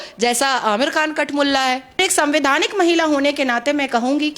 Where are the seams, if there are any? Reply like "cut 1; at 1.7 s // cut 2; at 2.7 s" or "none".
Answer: cut 1; at 2.0 s